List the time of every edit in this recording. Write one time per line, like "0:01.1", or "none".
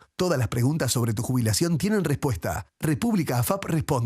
none

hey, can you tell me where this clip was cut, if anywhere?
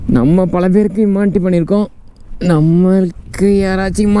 none

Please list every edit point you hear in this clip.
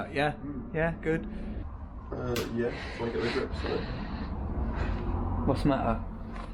0:01.6

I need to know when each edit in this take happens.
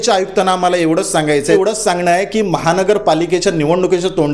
0:01.5

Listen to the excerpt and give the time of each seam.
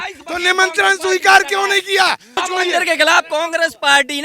0:02.4

